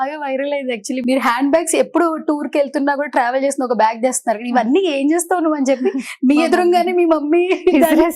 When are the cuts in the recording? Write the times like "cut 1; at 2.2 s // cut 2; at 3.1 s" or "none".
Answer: cut 1; at 1.0 s